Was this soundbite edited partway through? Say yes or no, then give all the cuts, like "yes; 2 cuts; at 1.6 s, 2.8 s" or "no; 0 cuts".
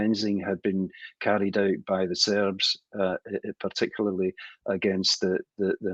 no; 0 cuts